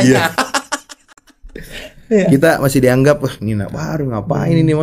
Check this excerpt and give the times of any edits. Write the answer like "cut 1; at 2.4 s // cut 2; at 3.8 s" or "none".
none